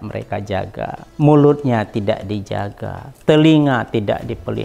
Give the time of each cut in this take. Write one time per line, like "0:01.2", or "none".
0:01.0